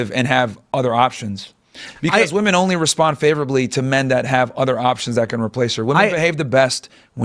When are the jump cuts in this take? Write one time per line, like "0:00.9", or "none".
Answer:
none

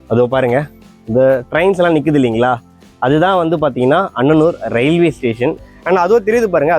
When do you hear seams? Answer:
0:05.7

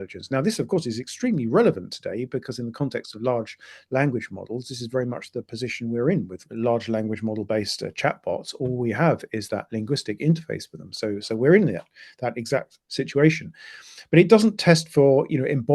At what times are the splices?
0:06.5

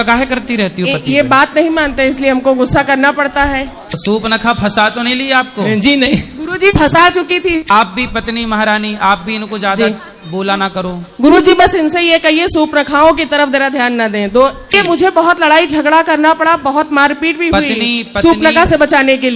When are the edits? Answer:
0:03.9
0:07.6
0:14.8

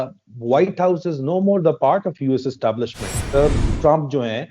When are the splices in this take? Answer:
0:03.3

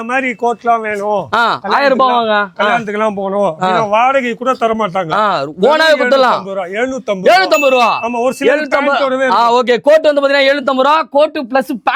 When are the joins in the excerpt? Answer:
none

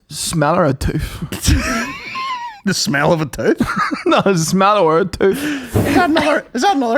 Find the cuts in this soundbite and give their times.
0:05.6

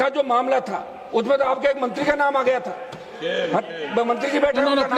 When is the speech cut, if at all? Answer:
none

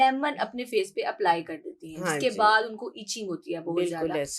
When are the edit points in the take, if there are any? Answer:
none

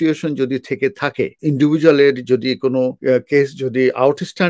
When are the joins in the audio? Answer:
0:01.3
0:03.0

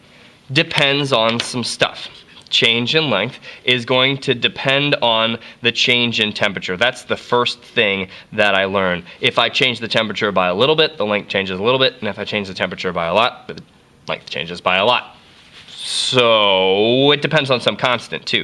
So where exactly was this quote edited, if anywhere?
0:07.2

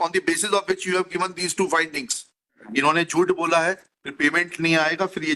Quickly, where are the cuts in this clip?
0:02.6

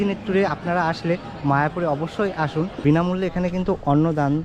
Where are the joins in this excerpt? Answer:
0:02.7

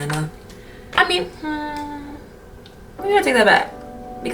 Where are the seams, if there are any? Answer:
0:00.9

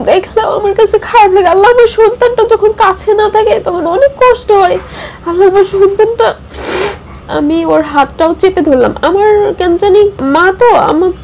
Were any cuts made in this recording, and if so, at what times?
0:07.0
0:10.2

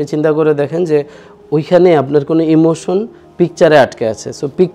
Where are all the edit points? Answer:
none

